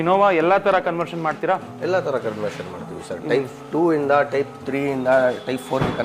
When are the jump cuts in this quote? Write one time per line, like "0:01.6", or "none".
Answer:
none